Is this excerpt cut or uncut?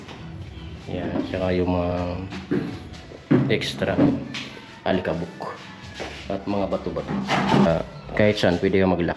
cut